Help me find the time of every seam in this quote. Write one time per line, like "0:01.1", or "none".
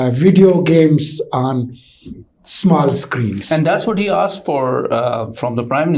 none